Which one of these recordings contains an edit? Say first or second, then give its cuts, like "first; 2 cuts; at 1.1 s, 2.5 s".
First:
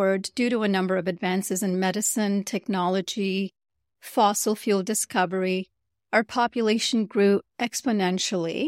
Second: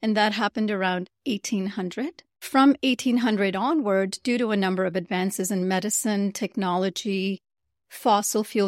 second; 1 cut; at 2.4 s